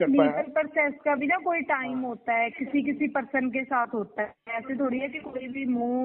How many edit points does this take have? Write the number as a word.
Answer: zero